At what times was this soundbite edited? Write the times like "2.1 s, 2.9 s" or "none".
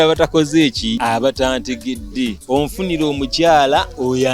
1.0 s, 2.4 s